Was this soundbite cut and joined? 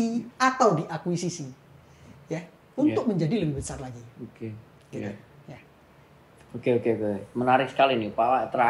no; 0 cuts

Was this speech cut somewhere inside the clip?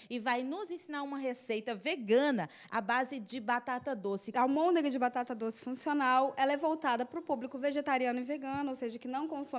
yes; 1 cut; at 4.3 s

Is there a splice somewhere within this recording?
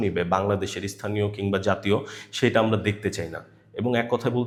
no; 0 cuts

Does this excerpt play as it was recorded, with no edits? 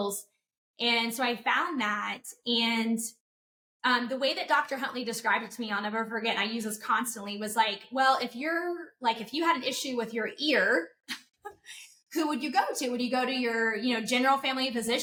yes; 0 cuts

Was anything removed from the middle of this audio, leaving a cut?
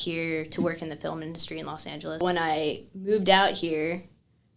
yes; 1 cut; at 2.2 s

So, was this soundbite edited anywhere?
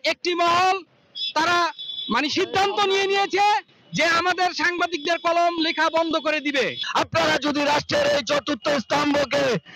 yes; 1 cut; at 6.8 s

